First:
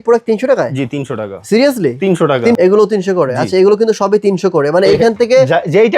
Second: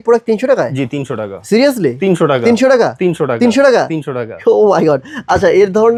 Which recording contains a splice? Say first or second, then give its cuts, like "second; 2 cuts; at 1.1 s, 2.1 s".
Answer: first; 1 cut; at 2.6 s